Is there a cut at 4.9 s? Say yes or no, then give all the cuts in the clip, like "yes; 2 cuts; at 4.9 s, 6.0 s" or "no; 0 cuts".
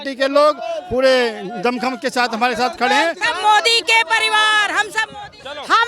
no; 1 cut; at 3.2 s